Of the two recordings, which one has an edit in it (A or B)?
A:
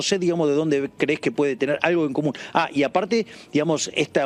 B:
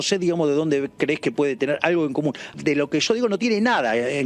B